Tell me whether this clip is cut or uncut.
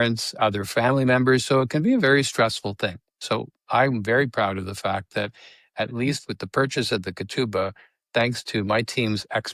uncut